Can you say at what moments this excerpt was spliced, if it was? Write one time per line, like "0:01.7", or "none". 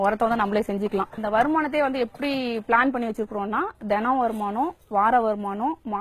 0:01.1

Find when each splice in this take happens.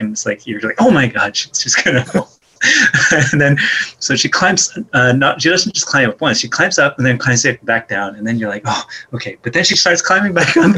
none

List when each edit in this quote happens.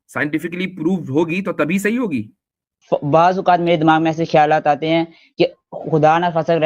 0:02.7

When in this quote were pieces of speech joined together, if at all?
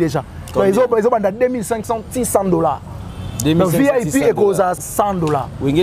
0:04.9

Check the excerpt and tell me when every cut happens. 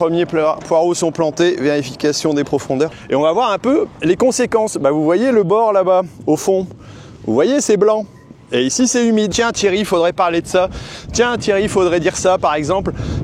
0:03.0
0:09.3

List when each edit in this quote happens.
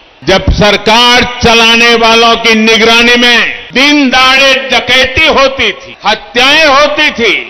0:03.6
0:05.9

